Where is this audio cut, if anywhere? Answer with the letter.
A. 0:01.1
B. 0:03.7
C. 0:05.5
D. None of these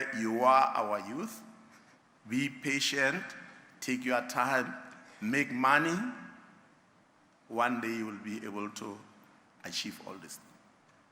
D